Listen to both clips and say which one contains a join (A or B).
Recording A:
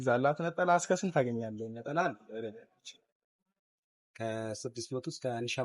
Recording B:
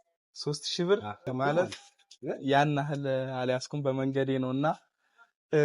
B